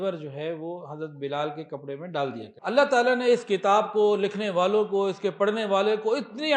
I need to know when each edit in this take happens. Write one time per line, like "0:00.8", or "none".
0:02.5